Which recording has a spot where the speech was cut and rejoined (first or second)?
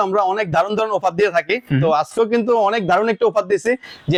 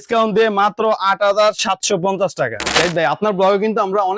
second